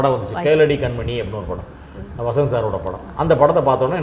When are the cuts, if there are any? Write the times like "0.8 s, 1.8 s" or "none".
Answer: none